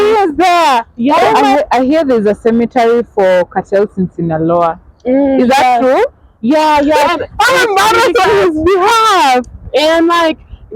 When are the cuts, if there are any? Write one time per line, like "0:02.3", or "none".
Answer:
0:01.4
0:07.0